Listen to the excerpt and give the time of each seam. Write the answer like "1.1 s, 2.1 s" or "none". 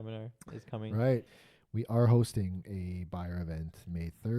1.3 s